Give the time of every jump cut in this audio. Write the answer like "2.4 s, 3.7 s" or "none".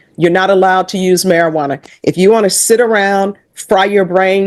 none